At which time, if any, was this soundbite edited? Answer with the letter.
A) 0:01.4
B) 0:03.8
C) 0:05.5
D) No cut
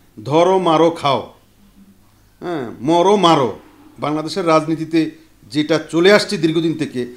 D